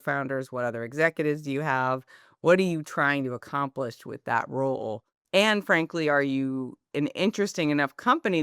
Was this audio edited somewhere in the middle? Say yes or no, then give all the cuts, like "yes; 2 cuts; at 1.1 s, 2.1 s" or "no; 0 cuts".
yes; 2 cuts; at 5.1 s, 6.8 s